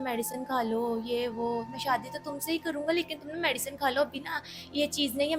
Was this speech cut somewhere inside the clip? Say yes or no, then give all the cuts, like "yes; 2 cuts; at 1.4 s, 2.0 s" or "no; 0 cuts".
no; 0 cuts